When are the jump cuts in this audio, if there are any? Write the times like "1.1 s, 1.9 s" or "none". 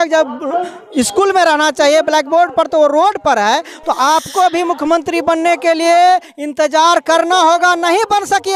none